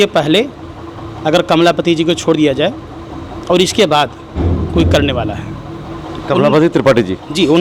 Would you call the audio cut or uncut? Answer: uncut